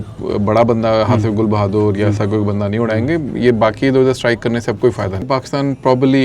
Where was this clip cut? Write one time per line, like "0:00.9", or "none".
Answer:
0:05.2

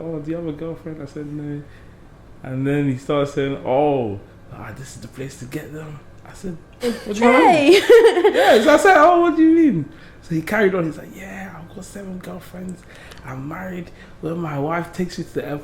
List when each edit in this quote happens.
none

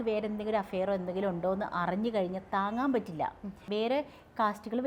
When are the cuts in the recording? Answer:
0:03.5

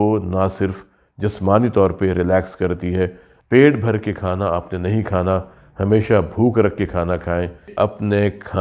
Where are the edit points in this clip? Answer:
0:03.3
0:07.7

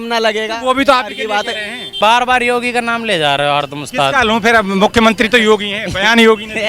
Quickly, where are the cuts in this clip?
0:01.9

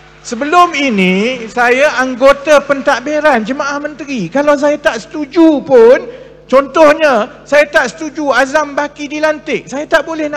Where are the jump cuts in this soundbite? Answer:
none

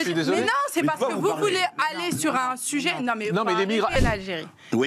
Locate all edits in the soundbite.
0:04.0

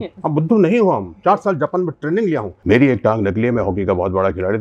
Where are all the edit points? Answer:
0:02.5

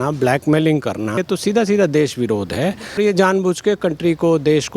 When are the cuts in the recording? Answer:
0:01.2
0:03.0

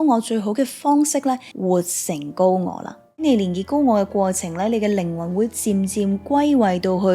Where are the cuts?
0:01.5
0:03.2

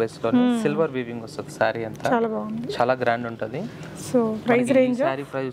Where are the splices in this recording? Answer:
none

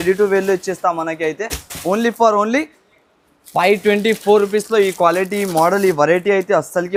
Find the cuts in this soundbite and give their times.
none

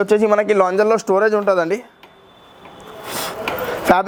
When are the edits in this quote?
none

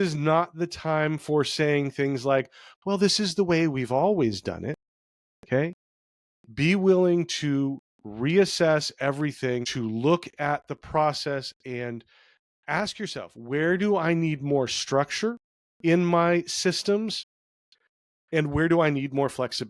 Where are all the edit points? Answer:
0:09.7

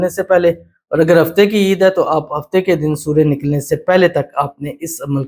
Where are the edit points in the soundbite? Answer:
none

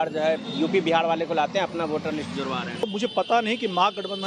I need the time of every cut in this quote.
0:02.9

